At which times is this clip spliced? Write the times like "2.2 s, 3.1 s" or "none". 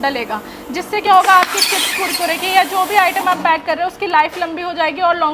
none